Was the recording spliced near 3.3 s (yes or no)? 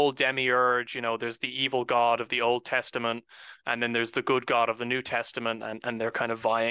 no